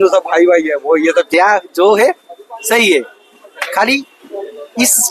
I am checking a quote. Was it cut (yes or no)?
yes